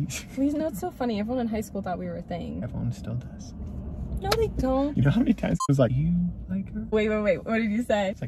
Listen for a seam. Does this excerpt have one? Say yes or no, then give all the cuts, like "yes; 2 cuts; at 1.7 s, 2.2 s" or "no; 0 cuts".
no; 0 cuts